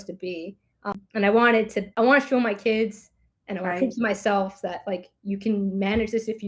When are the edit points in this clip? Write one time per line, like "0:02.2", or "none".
0:00.9
0:01.8